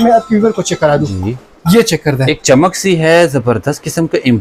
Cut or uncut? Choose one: uncut